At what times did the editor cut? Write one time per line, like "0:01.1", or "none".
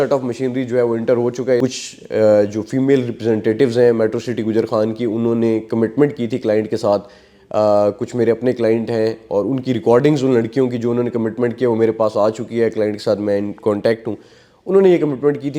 0:01.6